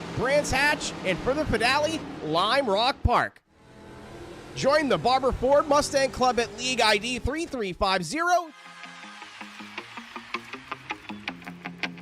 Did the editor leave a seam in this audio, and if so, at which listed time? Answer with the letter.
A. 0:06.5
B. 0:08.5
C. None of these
B